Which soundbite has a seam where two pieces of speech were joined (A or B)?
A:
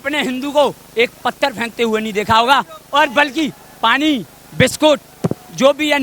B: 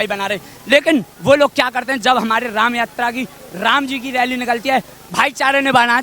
B